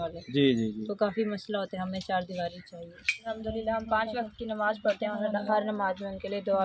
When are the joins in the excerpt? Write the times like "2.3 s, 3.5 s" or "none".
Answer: 3.3 s